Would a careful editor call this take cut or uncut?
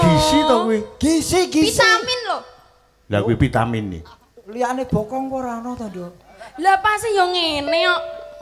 uncut